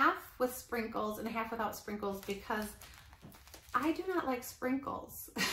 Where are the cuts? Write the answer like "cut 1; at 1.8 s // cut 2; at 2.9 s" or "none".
none